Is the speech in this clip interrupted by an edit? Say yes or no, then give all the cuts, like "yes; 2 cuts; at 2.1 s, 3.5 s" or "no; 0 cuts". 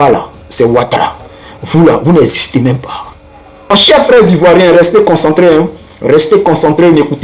yes; 1 cut; at 3.7 s